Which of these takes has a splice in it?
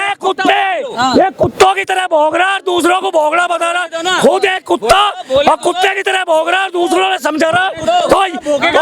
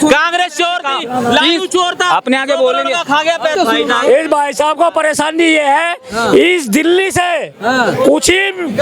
second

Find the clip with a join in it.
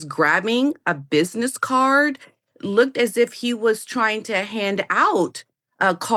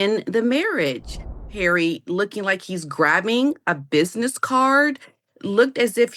second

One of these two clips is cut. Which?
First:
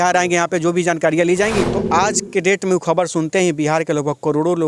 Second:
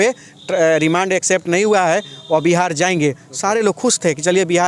first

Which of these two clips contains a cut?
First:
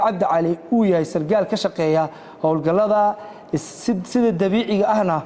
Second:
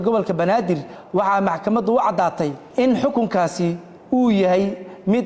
second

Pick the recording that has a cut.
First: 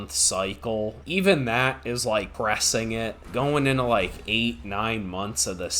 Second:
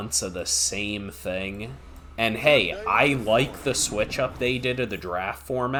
first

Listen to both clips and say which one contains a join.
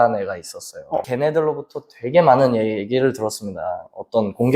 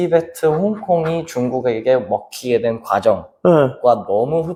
first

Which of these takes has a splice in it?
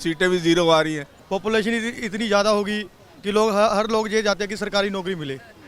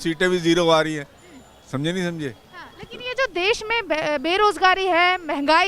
first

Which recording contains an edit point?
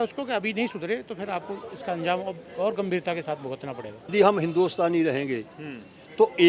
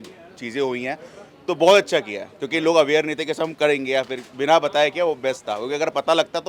first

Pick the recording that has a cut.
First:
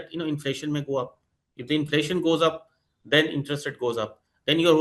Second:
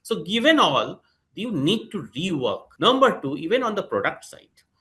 second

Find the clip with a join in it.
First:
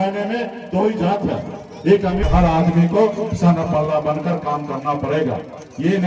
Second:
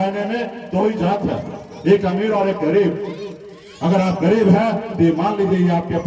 first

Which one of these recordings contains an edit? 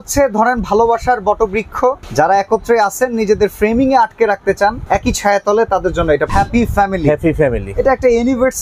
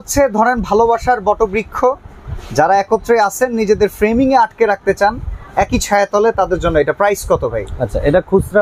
first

